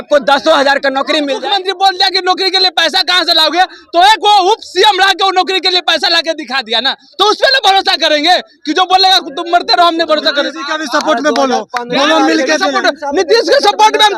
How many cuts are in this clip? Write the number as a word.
one